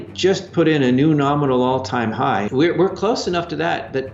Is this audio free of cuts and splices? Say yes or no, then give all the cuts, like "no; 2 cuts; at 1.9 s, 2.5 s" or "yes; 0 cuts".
no; 1 cut; at 2.5 s